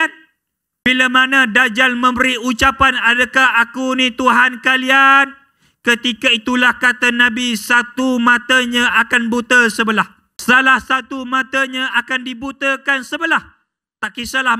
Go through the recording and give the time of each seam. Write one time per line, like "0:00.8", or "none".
0:00.9
0:10.2

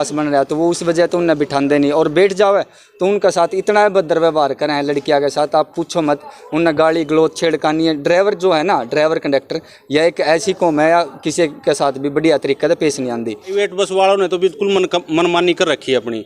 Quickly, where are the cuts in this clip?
0:13.5

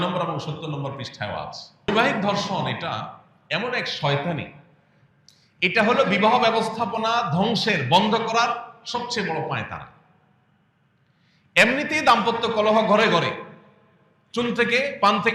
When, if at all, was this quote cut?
0:01.6

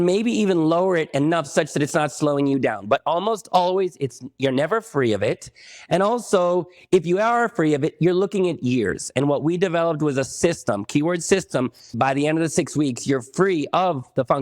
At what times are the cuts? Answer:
0:11.9

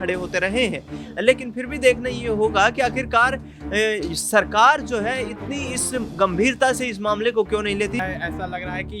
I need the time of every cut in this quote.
0:08.0

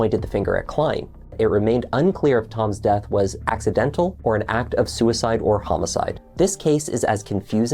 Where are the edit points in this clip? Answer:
0:01.3
0:04.2
0:06.2

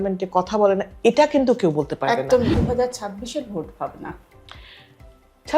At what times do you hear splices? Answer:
0:02.6

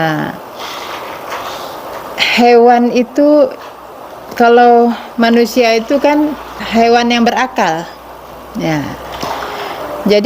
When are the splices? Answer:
0:06.6

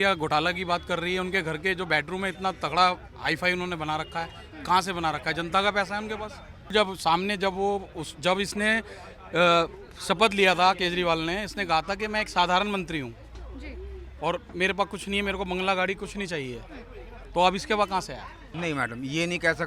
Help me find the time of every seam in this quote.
0:06.7
0:18.4

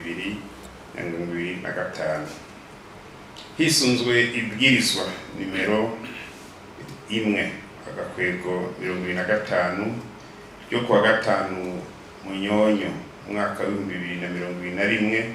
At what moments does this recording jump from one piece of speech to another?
none

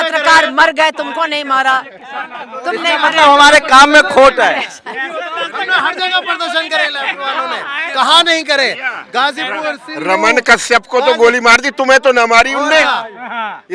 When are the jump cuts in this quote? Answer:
none

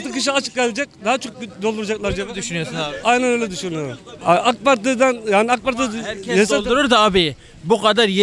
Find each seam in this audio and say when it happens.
0:04.2

